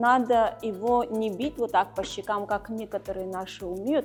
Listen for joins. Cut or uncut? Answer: uncut